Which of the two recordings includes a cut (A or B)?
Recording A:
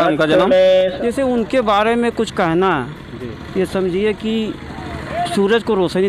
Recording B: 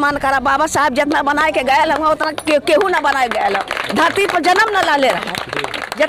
A